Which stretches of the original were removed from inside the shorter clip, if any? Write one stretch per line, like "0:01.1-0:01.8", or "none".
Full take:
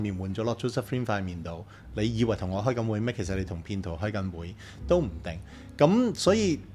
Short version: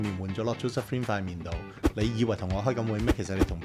none